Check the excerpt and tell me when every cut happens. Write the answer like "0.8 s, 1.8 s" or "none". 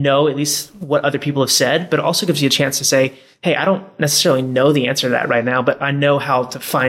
none